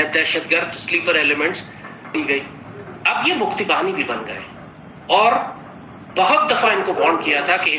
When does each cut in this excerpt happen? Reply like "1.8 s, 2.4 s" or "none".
2.1 s